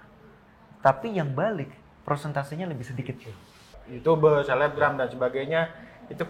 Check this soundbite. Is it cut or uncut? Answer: cut